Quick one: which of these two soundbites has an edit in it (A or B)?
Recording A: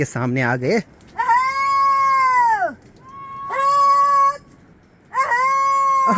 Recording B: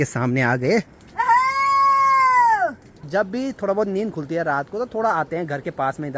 B